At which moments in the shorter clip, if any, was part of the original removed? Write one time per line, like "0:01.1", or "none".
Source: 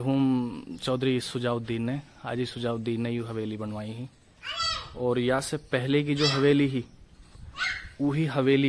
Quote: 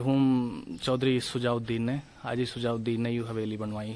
none

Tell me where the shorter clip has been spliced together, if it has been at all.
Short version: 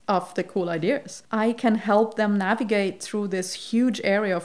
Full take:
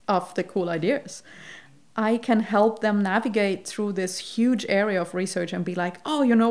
0:01.2

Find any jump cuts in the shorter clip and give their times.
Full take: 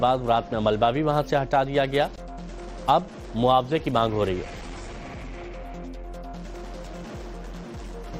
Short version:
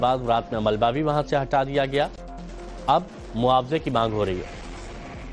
none

